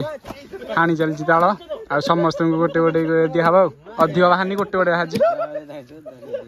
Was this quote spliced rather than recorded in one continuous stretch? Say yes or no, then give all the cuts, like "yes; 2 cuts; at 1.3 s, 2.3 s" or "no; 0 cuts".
no; 0 cuts